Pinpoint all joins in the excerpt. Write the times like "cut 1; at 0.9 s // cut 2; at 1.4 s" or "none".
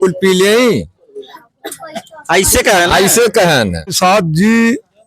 cut 1; at 4.0 s